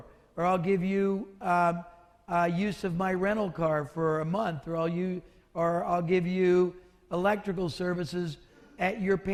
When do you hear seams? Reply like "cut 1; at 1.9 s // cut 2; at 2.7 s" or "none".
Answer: none